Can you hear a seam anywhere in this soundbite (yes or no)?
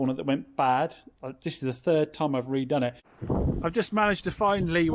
yes